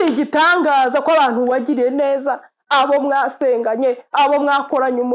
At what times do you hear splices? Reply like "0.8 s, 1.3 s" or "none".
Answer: none